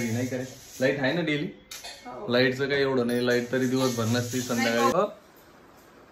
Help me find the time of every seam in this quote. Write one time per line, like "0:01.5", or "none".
0:04.9